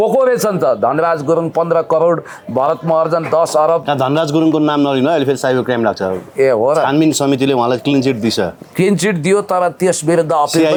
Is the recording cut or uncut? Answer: uncut